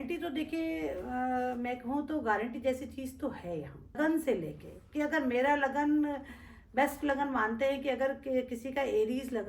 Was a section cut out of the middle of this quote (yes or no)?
yes